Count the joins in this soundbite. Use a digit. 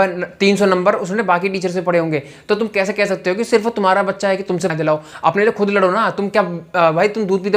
1